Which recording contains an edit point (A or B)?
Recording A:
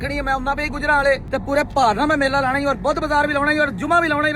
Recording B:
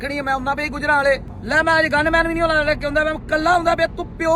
B